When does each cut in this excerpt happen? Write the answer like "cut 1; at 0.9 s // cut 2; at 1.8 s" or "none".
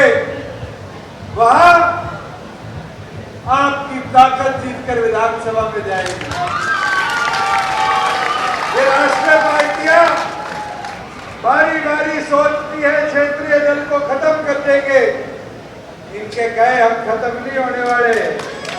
none